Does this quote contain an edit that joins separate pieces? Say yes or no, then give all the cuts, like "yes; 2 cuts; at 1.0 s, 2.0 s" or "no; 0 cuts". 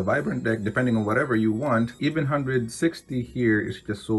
yes; 1 cut; at 2.0 s